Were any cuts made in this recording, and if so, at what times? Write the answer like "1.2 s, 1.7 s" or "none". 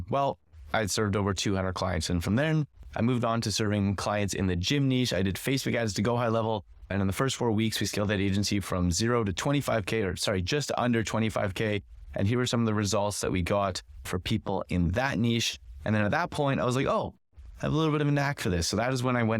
6.9 s, 14.1 s